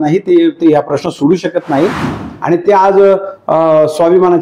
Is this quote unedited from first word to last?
no; 1 cut; at 2.1 s

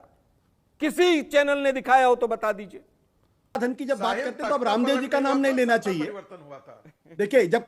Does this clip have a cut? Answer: yes; 1 cut; at 3.6 s

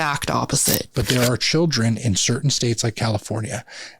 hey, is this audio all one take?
no; 1 cut; at 0.9 s

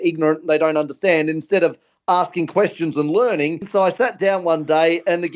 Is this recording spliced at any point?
yes; 1 cut; at 3.7 s

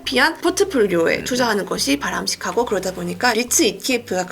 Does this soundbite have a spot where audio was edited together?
no; 0 cuts

